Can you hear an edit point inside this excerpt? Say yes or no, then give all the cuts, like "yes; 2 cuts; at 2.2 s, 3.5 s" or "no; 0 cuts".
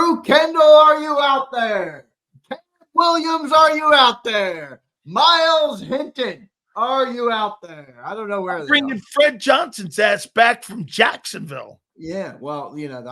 no; 0 cuts